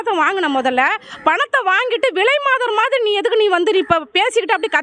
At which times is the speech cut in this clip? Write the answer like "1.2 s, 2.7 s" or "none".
none

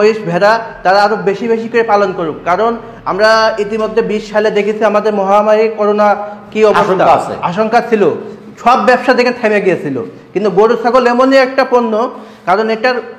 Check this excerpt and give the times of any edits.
none

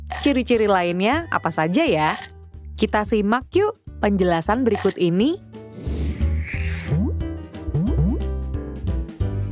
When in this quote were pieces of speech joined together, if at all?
4.1 s

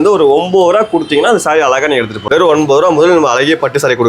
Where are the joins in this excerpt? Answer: 2.2 s

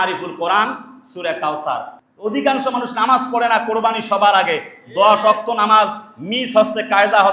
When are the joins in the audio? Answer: 1.9 s

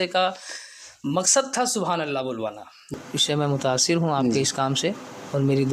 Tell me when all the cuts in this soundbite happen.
2.9 s

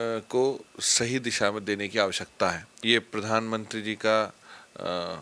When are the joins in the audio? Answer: 2.7 s

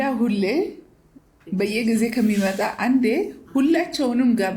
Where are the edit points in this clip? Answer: none

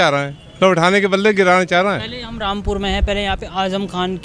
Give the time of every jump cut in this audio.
none

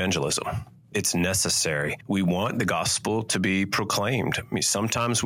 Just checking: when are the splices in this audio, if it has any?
0.9 s, 2.0 s

